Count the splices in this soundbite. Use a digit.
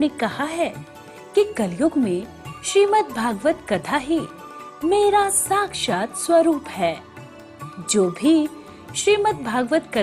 0